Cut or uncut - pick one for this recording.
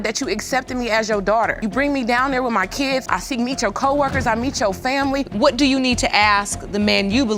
cut